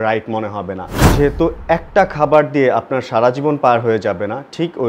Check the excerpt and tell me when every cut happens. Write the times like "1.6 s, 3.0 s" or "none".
0.9 s